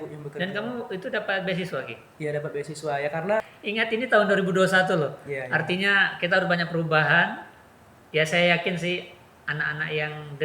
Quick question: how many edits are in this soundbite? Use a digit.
1